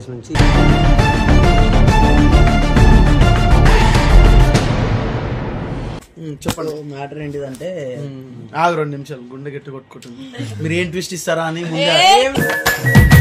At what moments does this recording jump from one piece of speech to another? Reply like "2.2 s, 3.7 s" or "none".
5.9 s